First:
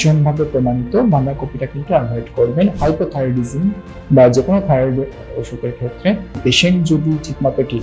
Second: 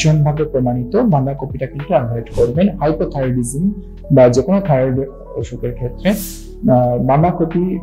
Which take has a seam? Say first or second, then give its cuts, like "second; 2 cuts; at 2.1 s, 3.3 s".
first; 1 cut; at 6.4 s